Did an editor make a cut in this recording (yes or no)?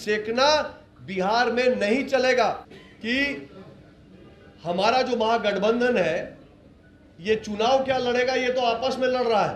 yes